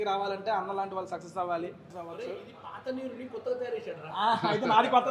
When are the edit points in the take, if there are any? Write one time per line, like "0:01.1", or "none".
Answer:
0:01.9